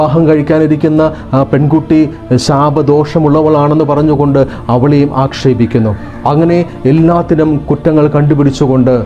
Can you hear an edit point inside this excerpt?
no; 0 cuts

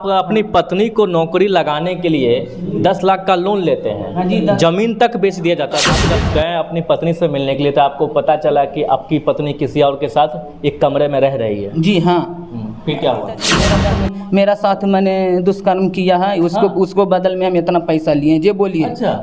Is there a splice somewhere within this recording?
yes; 2 cuts; at 6.0 s, 13.6 s

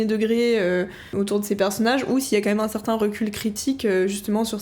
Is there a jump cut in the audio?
yes; 1 cut; at 1.1 s

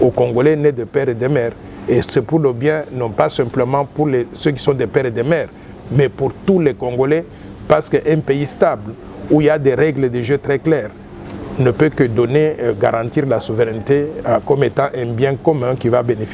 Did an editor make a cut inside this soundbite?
no; 0 cuts

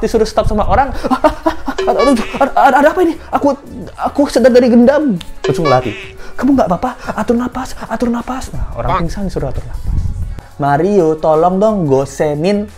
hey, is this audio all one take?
no; 1 cut; at 10.5 s

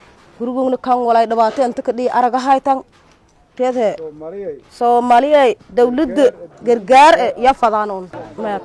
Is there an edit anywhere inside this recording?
no; 0 cuts

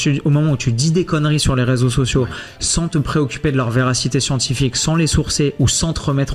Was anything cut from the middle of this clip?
no; 0 cuts

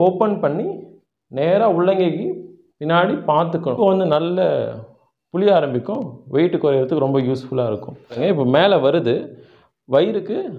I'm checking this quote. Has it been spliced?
yes; 2 cuts; at 3.8 s, 8.2 s

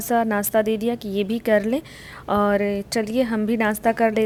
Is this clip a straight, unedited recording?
yes; 0 cuts

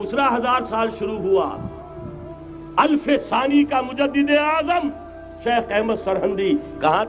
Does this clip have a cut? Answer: no; 0 cuts

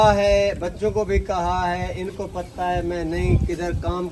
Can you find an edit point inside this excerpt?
no; 0 cuts

